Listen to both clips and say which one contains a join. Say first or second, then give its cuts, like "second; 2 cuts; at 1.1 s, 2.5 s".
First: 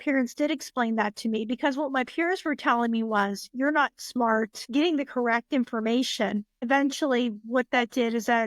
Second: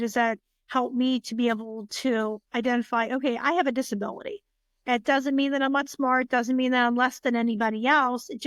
first; 2 cuts; at 4.6 s, 6.5 s